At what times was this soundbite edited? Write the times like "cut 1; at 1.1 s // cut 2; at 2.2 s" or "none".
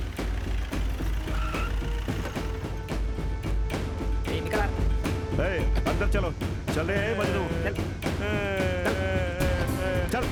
none